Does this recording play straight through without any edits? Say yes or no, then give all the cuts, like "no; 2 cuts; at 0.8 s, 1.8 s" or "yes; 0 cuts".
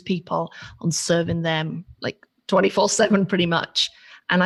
yes; 0 cuts